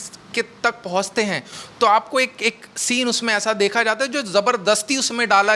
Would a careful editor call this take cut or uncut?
uncut